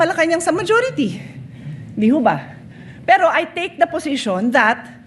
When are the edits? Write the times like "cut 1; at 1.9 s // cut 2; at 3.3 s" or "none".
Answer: none